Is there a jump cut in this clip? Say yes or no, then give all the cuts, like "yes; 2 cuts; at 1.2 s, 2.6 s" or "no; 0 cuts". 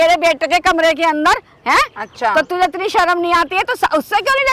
no; 0 cuts